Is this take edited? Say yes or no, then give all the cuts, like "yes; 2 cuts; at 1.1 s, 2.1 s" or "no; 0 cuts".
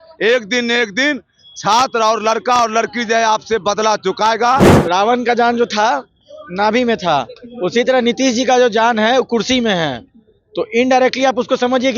yes; 1 cut; at 4.7 s